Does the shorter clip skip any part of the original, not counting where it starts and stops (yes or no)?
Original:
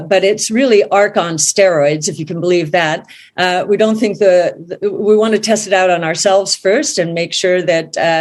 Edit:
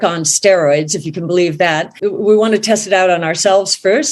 yes